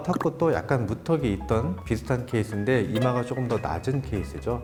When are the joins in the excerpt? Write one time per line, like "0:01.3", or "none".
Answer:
none